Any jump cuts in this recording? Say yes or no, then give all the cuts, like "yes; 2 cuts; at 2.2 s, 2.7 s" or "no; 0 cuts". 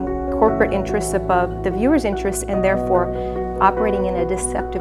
no; 0 cuts